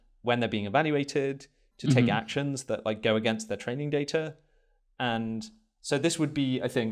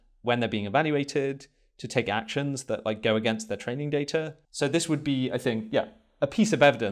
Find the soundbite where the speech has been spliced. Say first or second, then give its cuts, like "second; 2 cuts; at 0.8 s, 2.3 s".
second; 1 cut; at 4.4 s